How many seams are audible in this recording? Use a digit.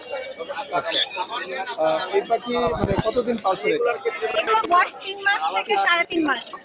0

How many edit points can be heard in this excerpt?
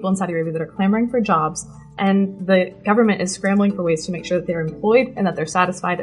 1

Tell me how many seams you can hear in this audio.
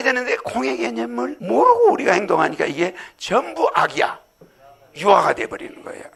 0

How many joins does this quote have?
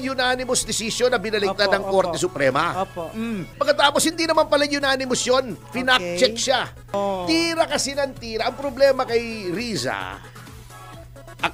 2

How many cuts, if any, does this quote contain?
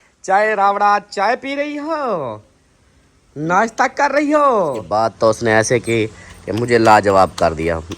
1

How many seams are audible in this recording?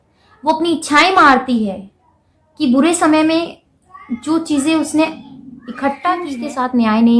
1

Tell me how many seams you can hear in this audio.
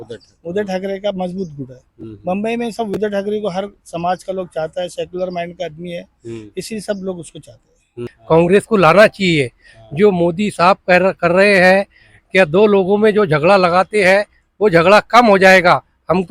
1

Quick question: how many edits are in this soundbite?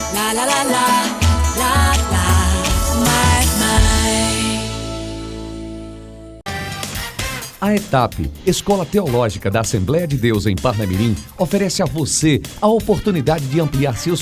1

